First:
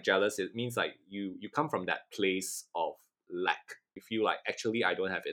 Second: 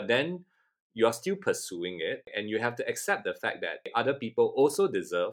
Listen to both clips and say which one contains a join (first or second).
second